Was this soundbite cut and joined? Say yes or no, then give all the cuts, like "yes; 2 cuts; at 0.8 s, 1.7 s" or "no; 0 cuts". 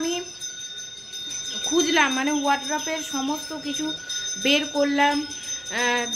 no; 0 cuts